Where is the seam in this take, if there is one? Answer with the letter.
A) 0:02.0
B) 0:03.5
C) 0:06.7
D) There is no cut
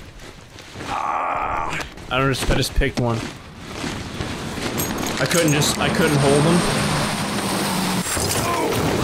A